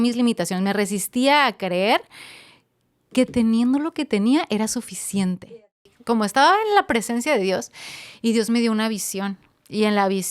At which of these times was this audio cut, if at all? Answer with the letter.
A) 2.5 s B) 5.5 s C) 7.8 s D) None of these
B